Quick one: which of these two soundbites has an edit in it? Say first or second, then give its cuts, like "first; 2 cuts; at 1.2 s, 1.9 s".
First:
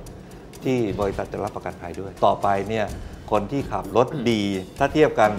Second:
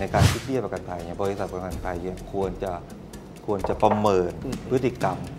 first; 1 cut; at 2.1 s